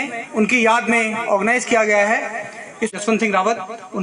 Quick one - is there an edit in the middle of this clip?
yes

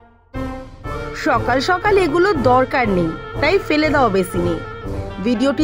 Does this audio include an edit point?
yes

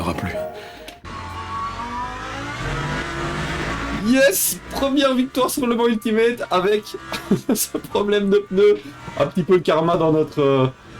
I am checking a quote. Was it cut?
yes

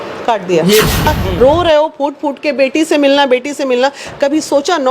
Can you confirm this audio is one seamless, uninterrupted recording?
no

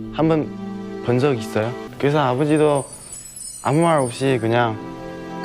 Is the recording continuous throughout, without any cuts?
no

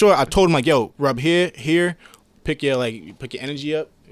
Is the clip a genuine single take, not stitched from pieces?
no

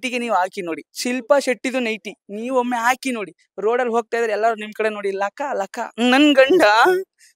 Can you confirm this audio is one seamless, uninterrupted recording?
no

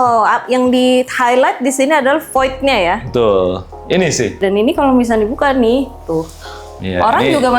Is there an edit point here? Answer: yes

